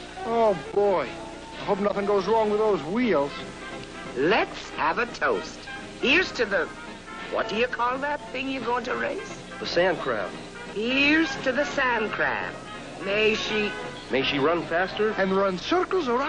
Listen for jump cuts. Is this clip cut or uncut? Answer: cut